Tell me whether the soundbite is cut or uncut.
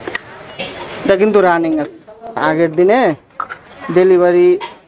cut